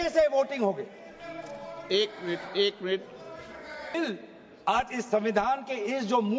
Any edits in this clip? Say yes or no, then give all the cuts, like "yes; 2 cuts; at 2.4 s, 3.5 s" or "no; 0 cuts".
yes; 1 cut; at 3.9 s